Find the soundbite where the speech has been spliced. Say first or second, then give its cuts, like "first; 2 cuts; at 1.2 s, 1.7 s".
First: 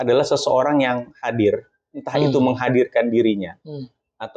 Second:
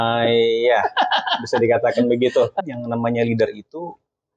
second; 1 cut; at 2.6 s